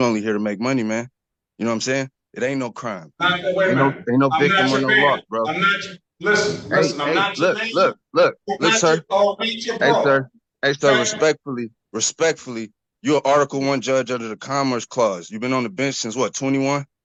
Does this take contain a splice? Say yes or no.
no